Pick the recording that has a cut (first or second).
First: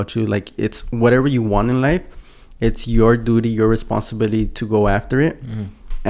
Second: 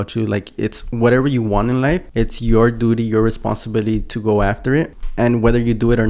second